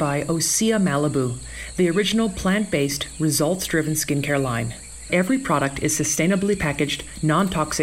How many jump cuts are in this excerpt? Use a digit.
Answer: 1